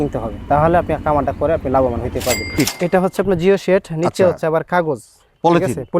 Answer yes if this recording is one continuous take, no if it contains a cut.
no